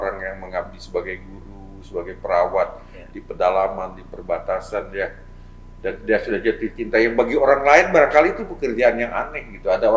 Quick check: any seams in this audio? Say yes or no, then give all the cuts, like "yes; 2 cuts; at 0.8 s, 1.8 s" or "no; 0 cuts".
no; 0 cuts